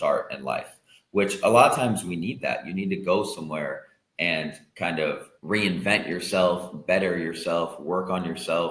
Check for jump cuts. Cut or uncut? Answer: cut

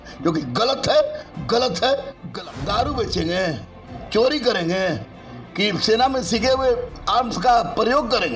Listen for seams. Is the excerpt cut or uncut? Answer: cut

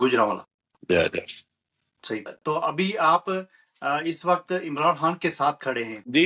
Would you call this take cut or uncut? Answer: cut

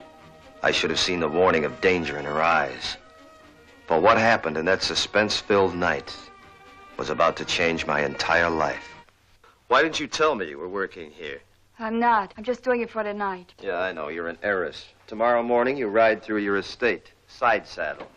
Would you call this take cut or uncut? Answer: cut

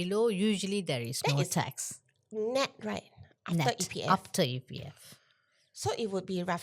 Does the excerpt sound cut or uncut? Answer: uncut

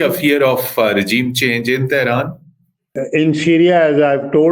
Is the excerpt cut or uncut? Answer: cut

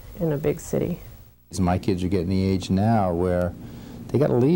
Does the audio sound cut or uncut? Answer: cut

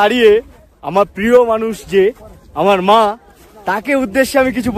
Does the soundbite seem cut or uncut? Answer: uncut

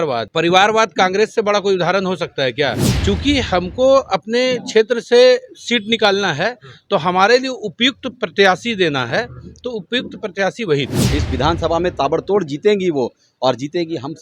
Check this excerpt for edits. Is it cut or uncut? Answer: cut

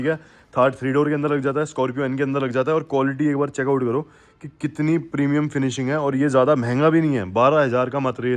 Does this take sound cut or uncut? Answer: uncut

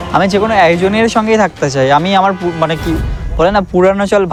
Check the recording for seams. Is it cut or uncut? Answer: uncut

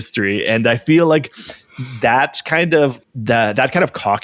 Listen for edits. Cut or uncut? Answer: uncut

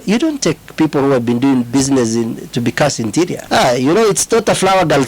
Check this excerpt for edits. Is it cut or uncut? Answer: cut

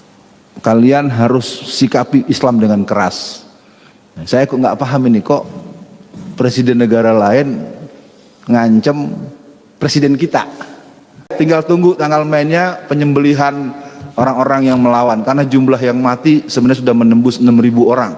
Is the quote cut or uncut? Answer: cut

